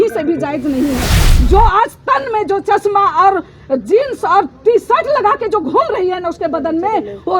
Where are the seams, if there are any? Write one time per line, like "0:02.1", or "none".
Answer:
0:01.2